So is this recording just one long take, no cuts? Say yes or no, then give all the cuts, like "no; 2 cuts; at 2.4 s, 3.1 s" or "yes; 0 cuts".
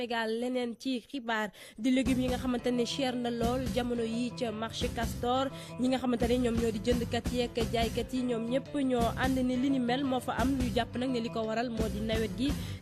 no; 1 cut; at 11.5 s